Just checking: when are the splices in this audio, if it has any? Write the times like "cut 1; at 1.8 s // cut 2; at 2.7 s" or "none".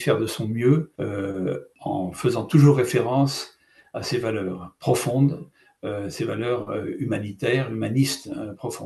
cut 1; at 1.5 s